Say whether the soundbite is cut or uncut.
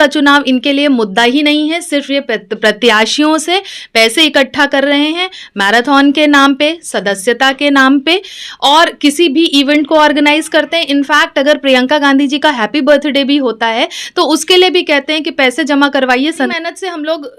cut